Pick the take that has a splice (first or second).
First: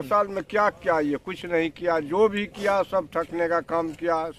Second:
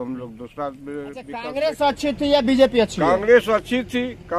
second